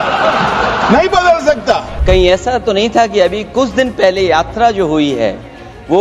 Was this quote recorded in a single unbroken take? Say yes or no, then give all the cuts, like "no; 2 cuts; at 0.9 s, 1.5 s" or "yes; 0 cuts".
no; 1 cut; at 1.9 s